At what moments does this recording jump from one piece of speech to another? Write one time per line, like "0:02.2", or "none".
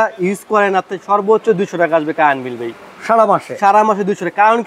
none